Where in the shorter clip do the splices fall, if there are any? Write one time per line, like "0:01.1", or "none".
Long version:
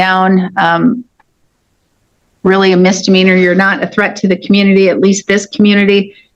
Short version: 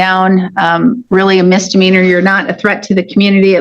0:01.0